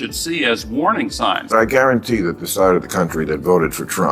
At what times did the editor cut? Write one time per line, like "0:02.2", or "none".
0:01.4